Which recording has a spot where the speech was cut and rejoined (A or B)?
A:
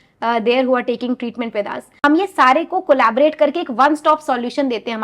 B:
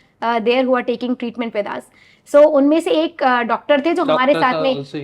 A